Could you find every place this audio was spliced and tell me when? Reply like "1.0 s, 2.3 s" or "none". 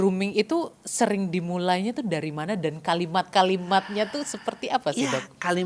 none